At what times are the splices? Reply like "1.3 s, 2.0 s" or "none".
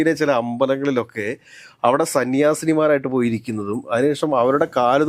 none

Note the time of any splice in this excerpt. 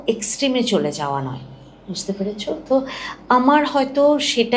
none

